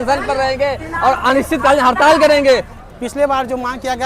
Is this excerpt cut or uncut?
cut